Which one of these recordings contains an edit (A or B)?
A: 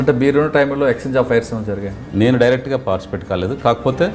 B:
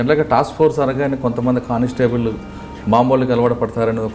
A